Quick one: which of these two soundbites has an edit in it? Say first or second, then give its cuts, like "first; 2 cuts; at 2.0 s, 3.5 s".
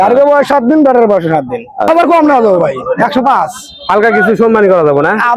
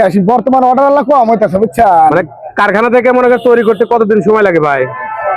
first; 1 cut; at 1.9 s